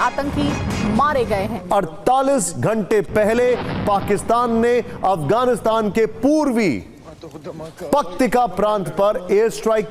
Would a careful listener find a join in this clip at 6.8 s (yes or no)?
no